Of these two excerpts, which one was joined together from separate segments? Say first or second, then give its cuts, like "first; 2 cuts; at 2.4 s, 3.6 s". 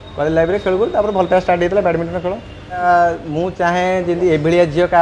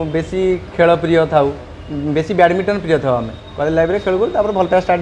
first; 1 cut; at 2.8 s